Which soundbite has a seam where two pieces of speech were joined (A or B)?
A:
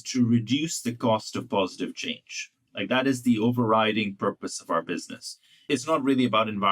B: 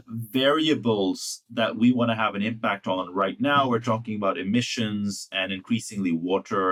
A